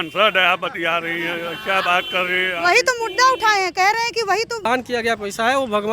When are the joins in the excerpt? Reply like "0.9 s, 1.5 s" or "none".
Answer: 4.6 s